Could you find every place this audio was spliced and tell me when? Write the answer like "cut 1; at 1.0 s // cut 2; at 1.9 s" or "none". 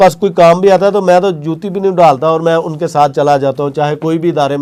none

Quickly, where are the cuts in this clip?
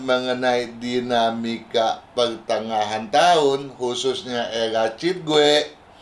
none

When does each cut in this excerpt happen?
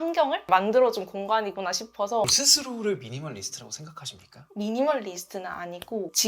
cut 1; at 2.2 s

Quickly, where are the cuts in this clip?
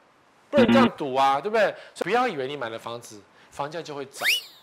cut 1; at 1.9 s

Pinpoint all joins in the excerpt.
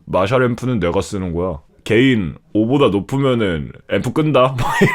cut 1; at 1.7 s // cut 2; at 3.7 s

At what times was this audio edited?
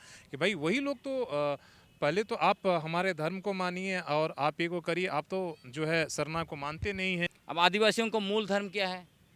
cut 1; at 7.4 s

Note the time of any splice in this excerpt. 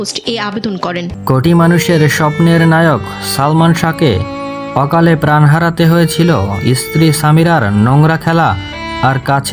cut 1; at 1.1 s

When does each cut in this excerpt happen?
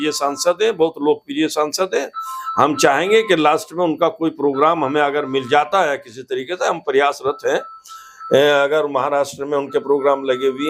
none

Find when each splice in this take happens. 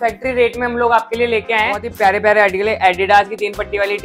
cut 1; at 1.9 s

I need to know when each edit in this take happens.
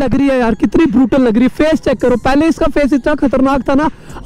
none

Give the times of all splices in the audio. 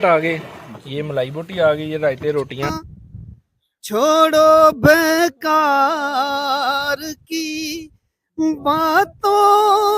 cut 1; at 2.7 s

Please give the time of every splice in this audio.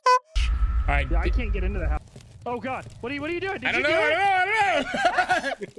cut 1; at 2.0 s

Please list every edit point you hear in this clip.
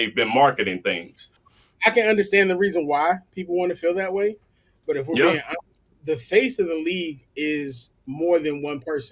cut 1; at 1.4 s

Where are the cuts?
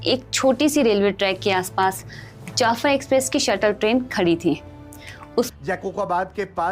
cut 1; at 5.5 s

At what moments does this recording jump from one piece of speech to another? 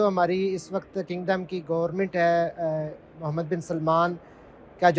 none

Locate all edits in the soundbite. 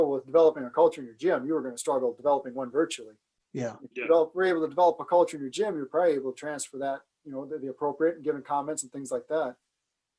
none

